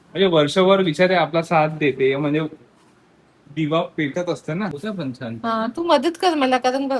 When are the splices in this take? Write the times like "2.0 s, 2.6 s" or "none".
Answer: 4.8 s